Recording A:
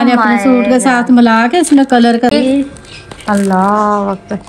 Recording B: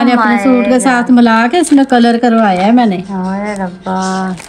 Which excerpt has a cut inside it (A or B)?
A